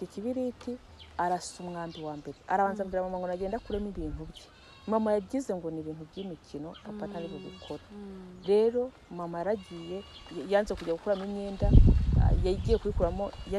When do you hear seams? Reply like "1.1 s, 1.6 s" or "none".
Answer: none